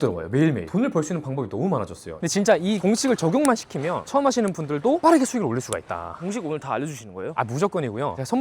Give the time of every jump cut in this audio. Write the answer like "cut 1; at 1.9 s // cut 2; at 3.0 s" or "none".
cut 1; at 2.1 s